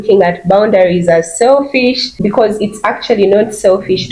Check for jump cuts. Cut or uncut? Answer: uncut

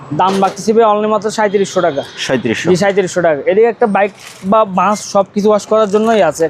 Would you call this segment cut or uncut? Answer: uncut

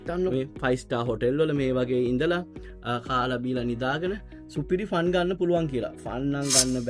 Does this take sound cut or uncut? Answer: uncut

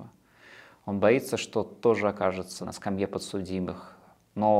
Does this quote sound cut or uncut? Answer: cut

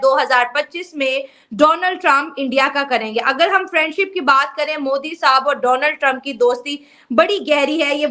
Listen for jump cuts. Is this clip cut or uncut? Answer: uncut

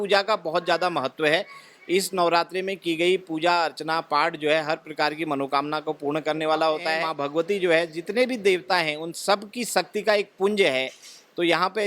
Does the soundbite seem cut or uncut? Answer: cut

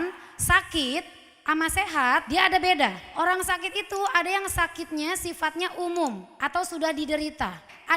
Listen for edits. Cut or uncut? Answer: cut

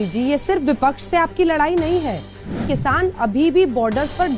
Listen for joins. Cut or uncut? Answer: cut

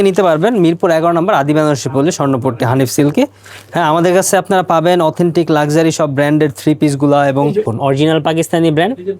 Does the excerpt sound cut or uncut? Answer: cut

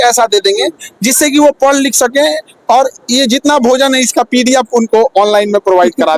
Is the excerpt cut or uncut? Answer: uncut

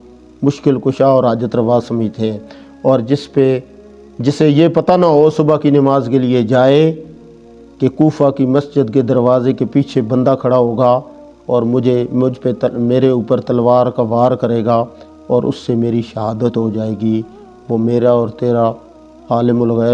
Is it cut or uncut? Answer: uncut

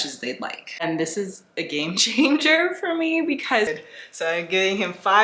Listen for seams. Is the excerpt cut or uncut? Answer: cut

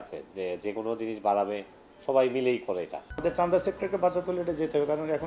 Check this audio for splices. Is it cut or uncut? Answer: cut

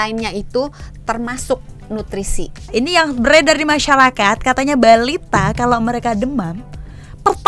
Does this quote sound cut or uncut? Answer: cut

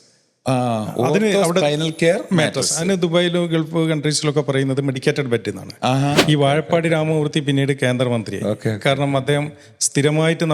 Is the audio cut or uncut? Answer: cut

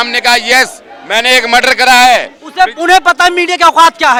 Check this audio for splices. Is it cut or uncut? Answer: uncut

